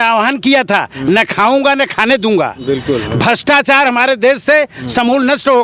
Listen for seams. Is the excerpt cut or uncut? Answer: uncut